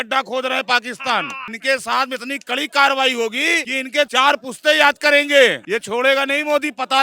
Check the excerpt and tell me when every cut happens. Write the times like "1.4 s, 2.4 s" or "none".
1.4 s, 3.9 s, 5.6 s